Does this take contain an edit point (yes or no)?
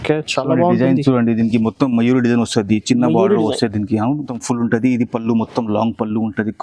yes